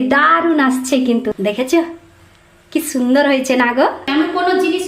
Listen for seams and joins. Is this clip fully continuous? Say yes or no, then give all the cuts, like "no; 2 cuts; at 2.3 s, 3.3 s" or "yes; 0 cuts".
no; 2 cuts; at 1.3 s, 4.0 s